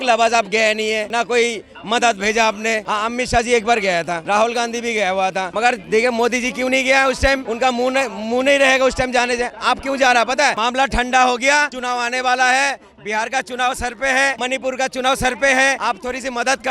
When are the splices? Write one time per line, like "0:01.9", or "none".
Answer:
0:01.1
0:02.8
0:04.2
0:05.5
0:07.5
0:10.6
0:11.8
0:14.4
0:15.8